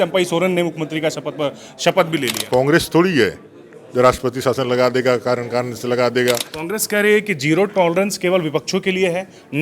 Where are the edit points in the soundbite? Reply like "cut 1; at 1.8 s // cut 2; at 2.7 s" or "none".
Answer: cut 1; at 2.4 s // cut 2; at 6.5 s